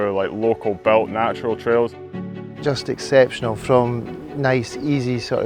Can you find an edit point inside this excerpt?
yes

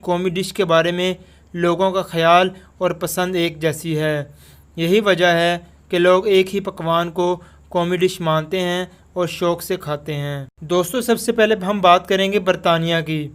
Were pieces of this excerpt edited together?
yes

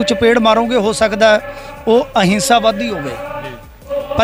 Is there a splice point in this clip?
no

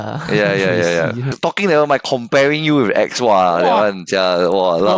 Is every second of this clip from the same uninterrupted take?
no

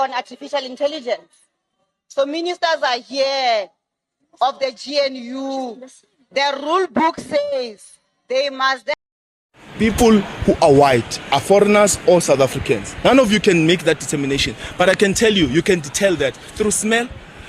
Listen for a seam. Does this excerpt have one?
yes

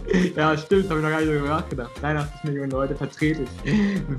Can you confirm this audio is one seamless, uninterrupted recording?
yes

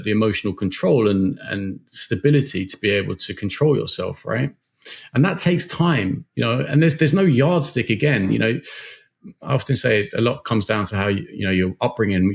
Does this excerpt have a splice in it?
no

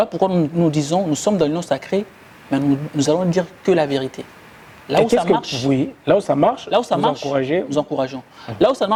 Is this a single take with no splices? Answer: yes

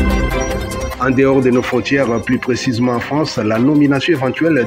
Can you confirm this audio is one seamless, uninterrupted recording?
no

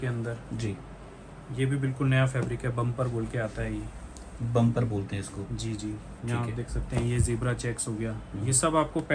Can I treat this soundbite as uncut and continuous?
yes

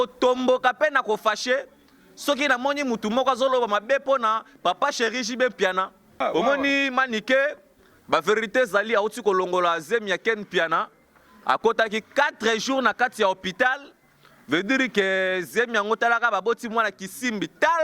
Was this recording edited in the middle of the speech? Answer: yes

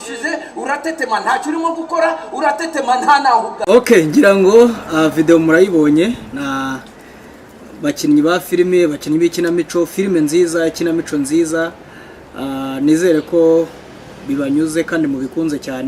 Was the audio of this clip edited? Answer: no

